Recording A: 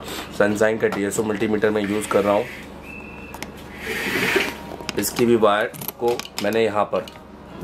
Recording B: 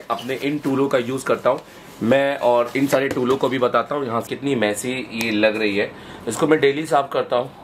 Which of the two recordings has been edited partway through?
B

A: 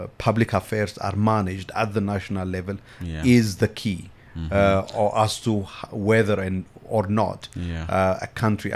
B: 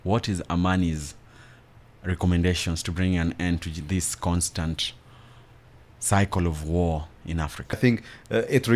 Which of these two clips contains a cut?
B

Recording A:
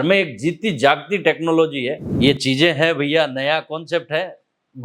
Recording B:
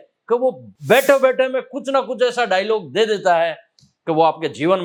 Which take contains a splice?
A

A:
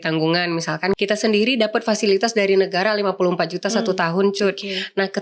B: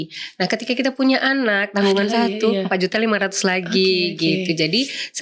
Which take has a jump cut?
A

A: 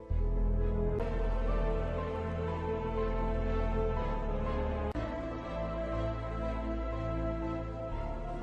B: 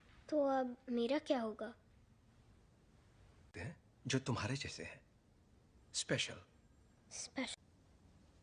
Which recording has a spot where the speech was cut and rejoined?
A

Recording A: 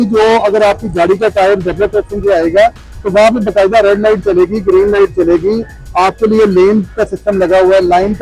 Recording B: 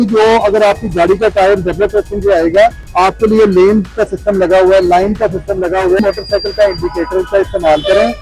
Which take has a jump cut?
B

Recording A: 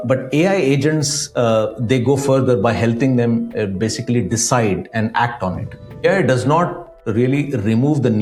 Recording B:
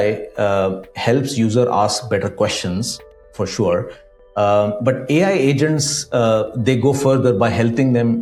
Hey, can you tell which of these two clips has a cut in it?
A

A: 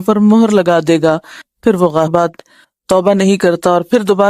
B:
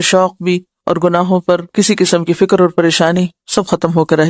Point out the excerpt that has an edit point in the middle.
A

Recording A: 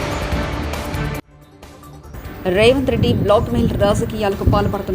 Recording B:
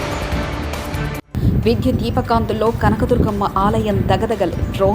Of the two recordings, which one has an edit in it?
A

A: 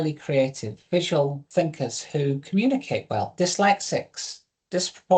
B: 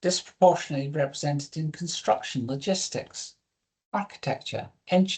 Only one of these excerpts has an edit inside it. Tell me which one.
A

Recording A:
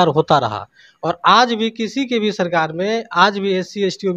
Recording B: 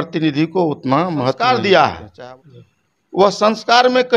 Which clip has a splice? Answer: B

